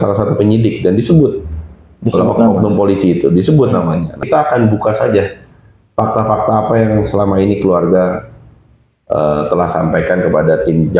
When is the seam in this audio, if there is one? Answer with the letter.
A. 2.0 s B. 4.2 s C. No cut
B